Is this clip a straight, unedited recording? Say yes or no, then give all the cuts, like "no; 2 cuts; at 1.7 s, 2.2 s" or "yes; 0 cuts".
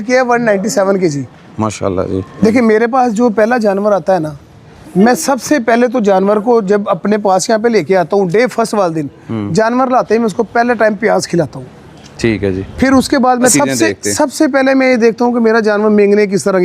no; 2 cuts; at 2.3 s, 13.5 s